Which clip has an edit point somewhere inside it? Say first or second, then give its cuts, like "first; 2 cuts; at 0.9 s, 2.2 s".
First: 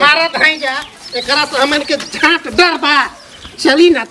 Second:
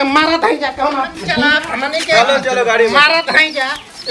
second; 1 cut; at 1.6 s